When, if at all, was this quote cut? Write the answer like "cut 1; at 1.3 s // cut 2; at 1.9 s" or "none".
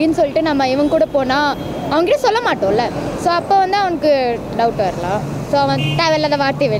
none